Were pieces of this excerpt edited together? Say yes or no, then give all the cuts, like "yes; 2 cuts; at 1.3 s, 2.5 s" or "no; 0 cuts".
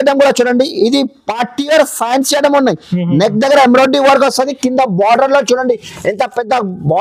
no; 0 cuts